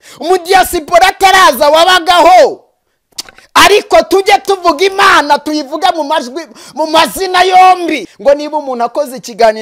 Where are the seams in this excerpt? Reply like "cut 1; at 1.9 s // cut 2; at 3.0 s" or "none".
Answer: cut 1; at 8.1 s